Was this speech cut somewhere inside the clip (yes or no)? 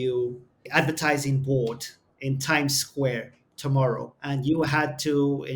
yes